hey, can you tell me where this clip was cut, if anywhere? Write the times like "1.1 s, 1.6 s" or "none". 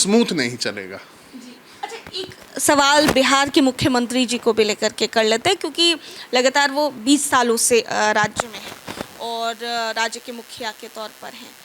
none